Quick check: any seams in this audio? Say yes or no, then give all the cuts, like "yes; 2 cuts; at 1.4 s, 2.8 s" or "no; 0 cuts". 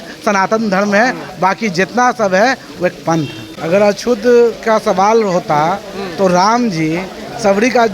yes; 1 cut; at 3.4 s